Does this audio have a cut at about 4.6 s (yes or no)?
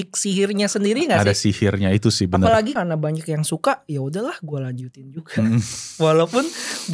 no